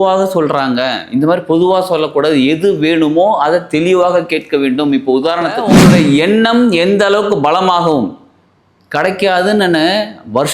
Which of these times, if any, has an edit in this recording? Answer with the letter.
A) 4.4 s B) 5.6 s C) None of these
B